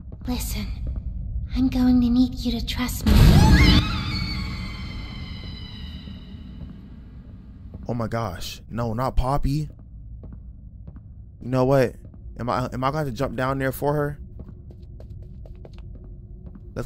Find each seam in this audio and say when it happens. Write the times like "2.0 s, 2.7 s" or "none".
none